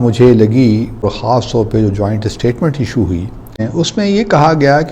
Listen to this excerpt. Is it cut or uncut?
cut